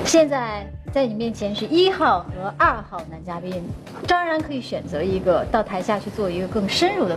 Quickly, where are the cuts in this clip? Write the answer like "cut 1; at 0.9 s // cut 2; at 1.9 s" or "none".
none